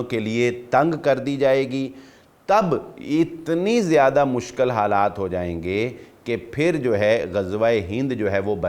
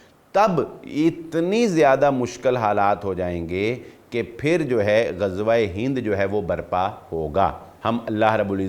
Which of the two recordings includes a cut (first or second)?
second